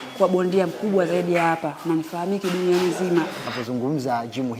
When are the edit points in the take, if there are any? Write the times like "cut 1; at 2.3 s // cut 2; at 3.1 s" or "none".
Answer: cut 1; at 3.5 s